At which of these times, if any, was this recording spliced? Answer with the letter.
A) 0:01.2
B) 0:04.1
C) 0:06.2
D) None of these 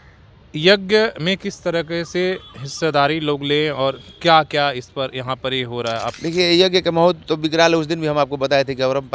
C